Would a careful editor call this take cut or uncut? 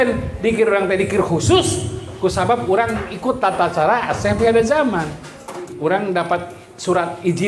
cut